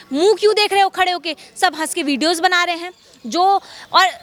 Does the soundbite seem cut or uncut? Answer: uncut